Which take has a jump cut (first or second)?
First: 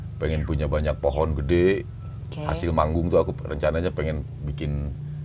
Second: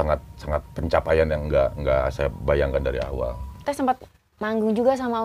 second